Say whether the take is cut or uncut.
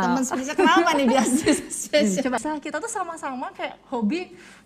cut